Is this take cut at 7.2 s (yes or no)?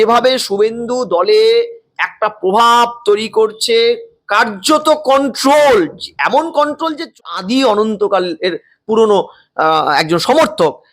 yes